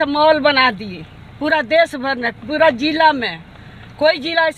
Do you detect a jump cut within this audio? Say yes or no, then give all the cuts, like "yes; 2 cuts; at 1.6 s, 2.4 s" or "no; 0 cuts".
no; 0 cuts